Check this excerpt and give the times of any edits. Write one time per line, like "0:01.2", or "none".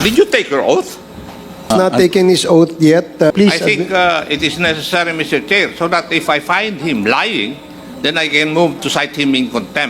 0:01.7
0:03.3